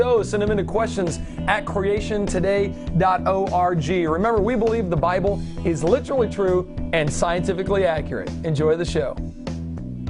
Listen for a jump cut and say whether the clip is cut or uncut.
cut